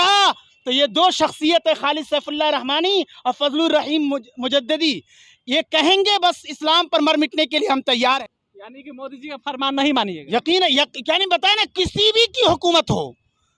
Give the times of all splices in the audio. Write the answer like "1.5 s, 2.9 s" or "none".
8.2 s